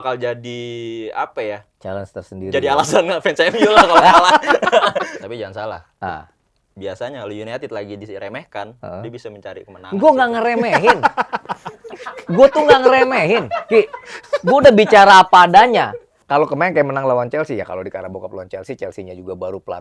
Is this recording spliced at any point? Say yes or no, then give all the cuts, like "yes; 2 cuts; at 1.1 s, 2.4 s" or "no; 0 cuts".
yes; 2 cuts; at 5.1 s, 16.1 s